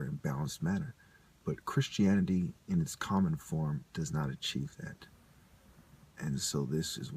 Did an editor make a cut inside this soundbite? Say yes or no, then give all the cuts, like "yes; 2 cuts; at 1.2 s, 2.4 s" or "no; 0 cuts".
yes; 1 cut; at 3.4 s